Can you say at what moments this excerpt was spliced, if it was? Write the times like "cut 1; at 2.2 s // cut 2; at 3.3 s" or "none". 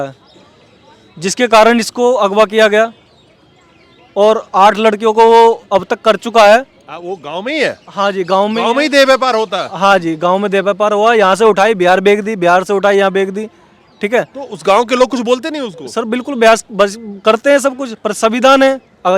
none

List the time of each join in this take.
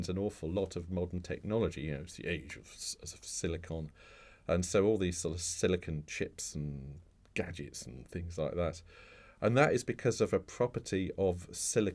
none

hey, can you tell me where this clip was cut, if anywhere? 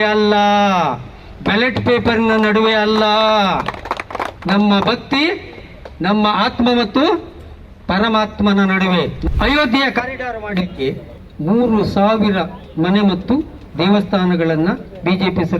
cut 1; at 9.2 s

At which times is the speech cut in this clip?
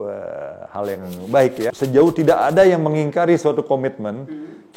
cut 1; at 1.7 s

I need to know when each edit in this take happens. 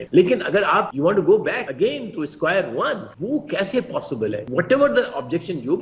cut 1; at 0.9 s // cut 2; at 1.7 s // cut 3; at 3.1 s // cut 4; at 4.4 s

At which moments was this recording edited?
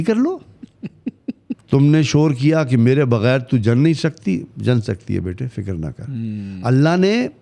cut 1; at 1.5 s

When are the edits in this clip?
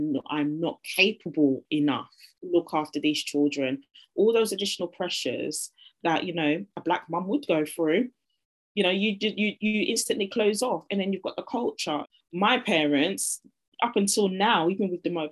cut 1; at 2.3 s // cut 2; at 12.1 s

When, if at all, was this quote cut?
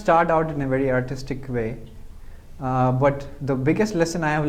none

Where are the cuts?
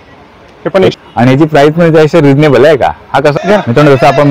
cut 1; at 0.9 s // cut 2; at 3.3 s

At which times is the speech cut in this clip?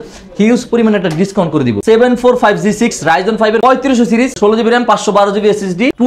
cut 1; at 1.8 s

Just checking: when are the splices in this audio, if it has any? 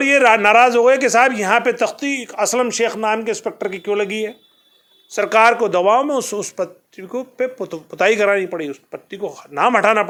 none

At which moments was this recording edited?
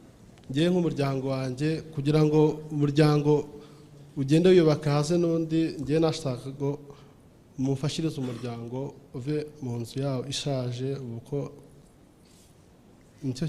none

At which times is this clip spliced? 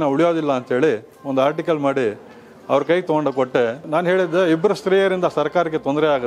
cut 1; at 3.8 s

